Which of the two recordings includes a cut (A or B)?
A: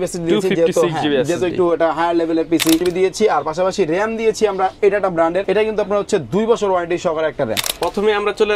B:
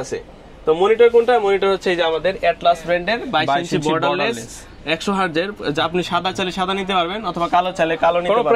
A